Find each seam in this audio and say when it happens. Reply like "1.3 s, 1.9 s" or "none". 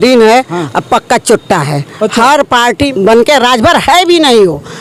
2.9 s